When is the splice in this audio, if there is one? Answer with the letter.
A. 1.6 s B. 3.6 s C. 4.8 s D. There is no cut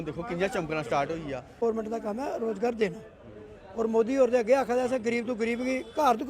A